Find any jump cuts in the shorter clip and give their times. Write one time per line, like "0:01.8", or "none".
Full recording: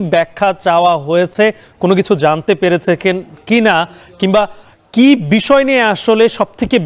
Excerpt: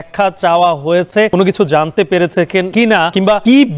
0:01.3
0:03.0